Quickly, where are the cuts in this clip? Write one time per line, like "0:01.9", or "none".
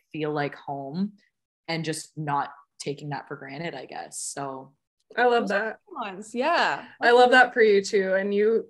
none